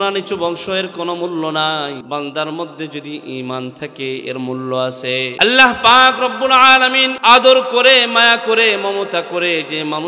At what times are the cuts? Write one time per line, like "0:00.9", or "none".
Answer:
0:02.0
0:05.3
0:07.1